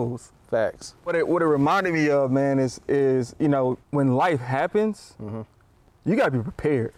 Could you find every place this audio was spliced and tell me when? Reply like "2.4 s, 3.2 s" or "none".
1.1 s, 3.8 s